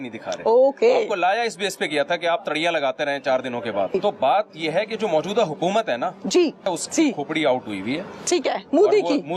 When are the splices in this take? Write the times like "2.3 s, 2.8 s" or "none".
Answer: 3.9 s, 6.7 s